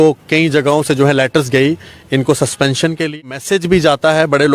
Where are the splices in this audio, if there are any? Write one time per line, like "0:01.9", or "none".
0:03.1